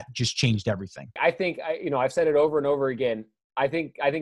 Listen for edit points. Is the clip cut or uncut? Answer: cut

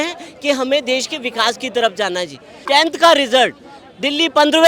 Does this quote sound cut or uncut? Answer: cut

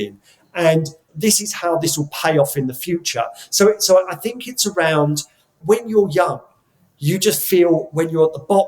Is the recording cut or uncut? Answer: cut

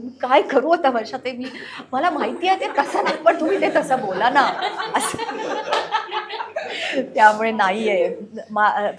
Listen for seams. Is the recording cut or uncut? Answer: uncut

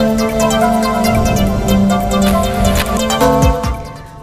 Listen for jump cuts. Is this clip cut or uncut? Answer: uncut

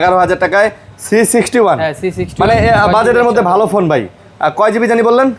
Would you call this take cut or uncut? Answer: uncut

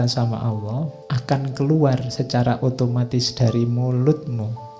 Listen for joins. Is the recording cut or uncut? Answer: cut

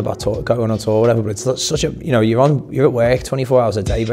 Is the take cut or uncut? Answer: uncut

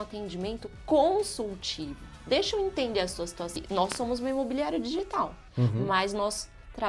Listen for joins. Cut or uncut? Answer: cut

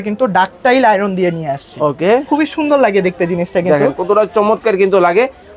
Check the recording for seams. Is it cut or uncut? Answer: cut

